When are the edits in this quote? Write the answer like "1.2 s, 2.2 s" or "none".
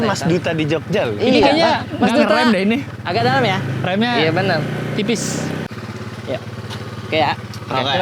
5.7 s